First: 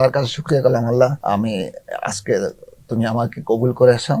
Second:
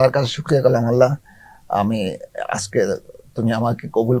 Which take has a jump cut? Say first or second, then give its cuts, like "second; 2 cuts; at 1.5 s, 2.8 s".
first; 1 cut; at 1.2 s